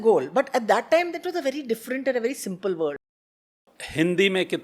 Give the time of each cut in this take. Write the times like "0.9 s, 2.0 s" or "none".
3.5 s

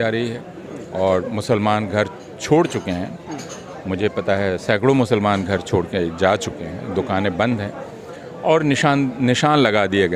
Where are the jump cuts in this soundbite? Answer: none

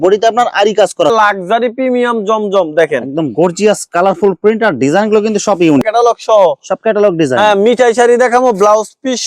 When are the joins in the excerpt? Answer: 1.1 s, 5.8 s

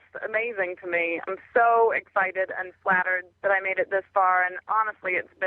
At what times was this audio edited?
1.2 s, 3.2 s

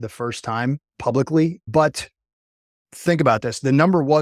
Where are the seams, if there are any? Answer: 1.6 s, 2.8 s

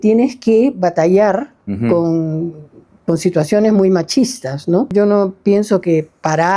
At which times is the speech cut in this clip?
4.9 s

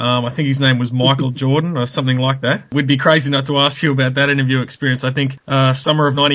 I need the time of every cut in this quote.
2.7 s

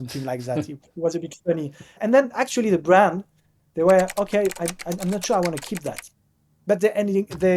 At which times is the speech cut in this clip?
2.0 s

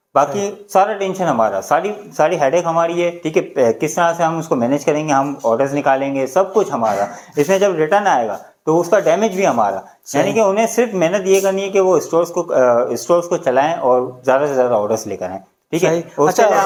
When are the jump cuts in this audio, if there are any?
none

